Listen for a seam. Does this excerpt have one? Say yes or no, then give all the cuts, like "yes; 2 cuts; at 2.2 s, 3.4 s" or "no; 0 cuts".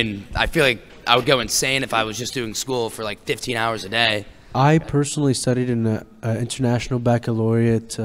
yes; 1 cut; at 4.3 s